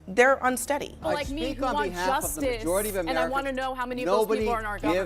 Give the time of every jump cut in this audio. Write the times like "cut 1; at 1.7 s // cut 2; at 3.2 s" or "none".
cut 1; at 1.0 s